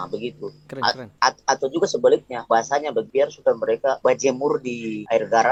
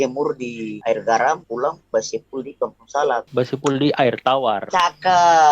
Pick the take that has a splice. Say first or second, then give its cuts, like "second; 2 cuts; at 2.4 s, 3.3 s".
second; 2 cuts; at 3.3 s, 4.6 s